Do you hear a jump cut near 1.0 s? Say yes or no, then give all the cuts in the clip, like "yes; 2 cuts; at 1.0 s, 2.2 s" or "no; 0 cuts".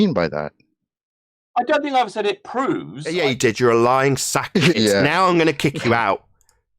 no; 2 cuts; at 3.0 s, 4.8 s